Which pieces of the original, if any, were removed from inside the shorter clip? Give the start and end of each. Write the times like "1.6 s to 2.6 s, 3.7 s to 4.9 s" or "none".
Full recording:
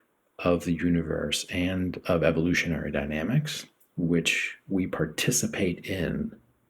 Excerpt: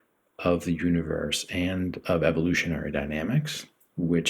none